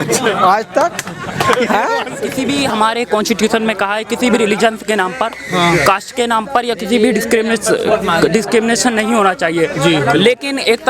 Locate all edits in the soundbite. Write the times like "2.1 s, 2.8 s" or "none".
2.4 s